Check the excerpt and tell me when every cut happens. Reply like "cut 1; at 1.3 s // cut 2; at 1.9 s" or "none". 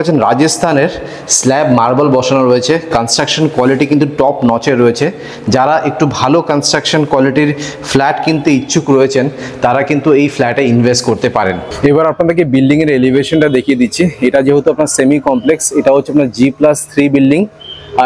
cut 1; at 11.7 s